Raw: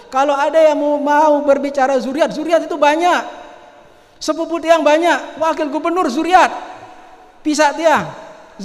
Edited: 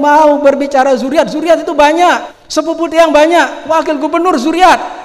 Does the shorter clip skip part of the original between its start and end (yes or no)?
yes